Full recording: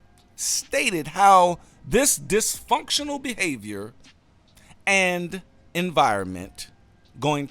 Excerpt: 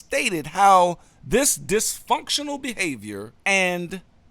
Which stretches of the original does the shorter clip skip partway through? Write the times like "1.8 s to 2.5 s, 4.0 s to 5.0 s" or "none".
3.9 s to 4.7 s